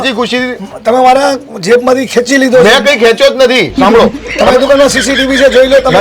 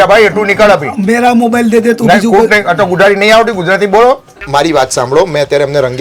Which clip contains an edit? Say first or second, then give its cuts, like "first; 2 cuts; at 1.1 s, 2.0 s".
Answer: second; 1 cut; at 4.3 s